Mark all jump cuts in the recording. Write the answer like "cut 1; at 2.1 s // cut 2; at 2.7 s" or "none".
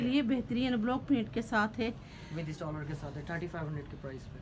none